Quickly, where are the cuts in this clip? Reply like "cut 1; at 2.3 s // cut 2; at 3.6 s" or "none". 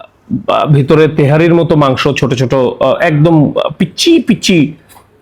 none